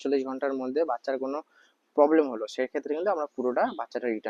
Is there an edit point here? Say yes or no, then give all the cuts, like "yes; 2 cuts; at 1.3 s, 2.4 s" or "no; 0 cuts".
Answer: no; 0 cuts